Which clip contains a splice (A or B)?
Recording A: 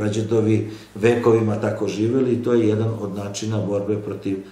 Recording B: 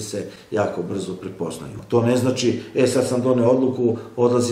B